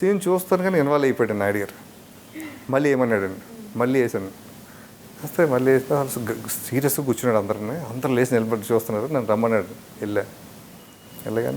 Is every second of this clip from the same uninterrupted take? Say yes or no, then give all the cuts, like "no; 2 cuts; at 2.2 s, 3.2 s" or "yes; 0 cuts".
yes; 0 cuts